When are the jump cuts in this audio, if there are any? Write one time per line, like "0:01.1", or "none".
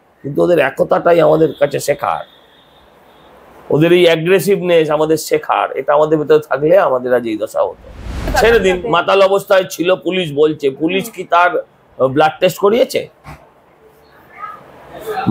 0:08.2